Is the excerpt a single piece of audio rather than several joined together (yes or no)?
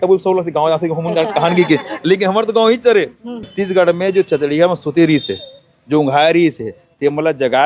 no